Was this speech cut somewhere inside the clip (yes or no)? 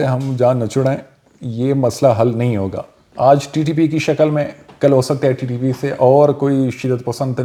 no